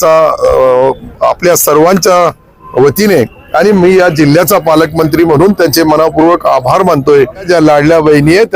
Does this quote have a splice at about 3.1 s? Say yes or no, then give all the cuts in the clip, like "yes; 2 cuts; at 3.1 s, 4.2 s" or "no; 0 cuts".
no; 1 cut; at 7.5 s